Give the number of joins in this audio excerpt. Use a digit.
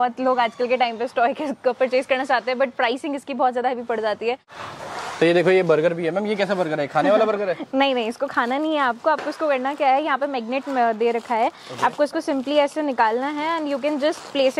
1